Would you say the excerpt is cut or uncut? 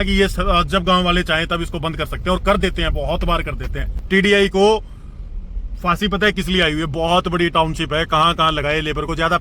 cut